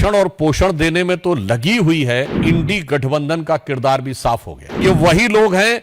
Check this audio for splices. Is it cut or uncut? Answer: cut